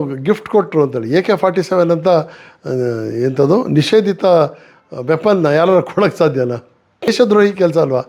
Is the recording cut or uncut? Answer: cut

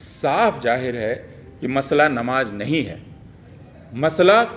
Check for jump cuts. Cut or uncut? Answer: uncut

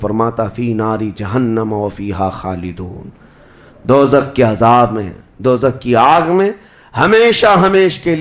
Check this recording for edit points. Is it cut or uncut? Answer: uncut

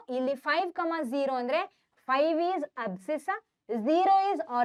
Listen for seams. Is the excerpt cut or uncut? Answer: uncut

